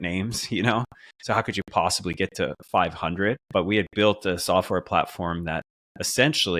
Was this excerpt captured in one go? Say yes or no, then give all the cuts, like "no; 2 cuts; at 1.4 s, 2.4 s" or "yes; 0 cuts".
no; 1 cut; at 3.4 s